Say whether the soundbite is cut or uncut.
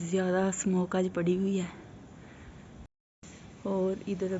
cut